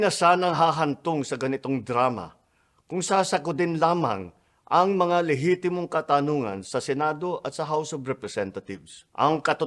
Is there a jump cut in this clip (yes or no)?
no